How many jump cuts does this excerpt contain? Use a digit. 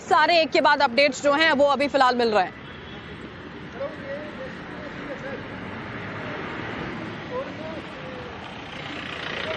1